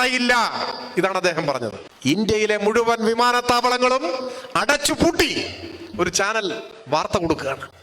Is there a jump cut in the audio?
yes; 1 cut; at 1.8 s

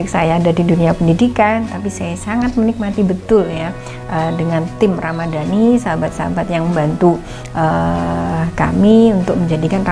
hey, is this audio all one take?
yes; 0 cuts

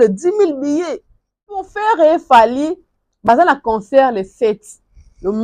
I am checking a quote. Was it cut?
yes; 1 cut; at 1.7 s

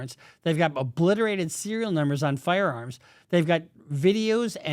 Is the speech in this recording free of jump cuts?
yes; 0 cuts

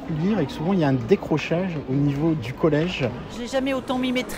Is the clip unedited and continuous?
no; 1 cut; at 3.3 s

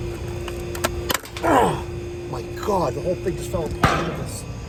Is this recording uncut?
yes; 0 cuts

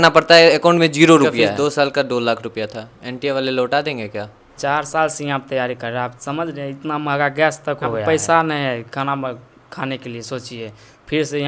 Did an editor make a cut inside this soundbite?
yes; 3 cuts; at 1.4 s, 4.4 s, 8.0 s

